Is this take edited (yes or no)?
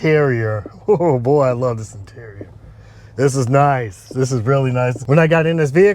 no